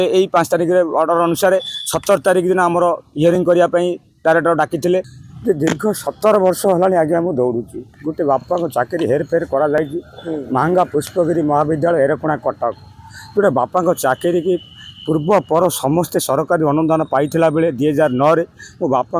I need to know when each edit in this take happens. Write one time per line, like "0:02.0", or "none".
0:03.4
0:05.2